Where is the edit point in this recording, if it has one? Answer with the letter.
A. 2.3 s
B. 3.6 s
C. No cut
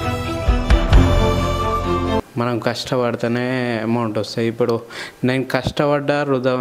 A